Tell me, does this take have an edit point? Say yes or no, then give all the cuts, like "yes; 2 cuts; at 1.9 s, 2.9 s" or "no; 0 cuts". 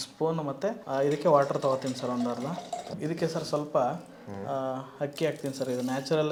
no; 0 cuts